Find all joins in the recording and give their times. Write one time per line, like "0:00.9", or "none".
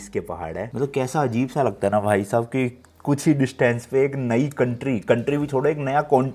none